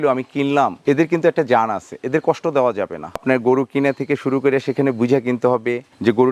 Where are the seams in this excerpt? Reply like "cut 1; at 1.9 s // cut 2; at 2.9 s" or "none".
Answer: cut 1; at 3.2 s